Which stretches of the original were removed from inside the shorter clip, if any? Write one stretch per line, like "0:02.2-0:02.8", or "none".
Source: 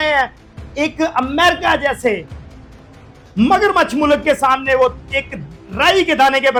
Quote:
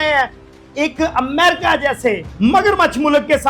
0:02.3-0:03.2